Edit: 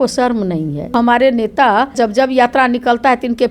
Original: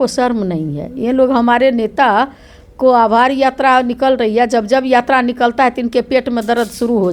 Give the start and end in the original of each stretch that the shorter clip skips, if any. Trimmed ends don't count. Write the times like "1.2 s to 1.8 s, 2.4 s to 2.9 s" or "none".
0.9 s to 1.3 s, 2.4 s to 4.5 s